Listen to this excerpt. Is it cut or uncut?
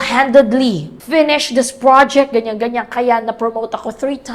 cut